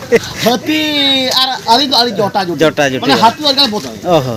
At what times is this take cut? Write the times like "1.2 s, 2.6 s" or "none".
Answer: none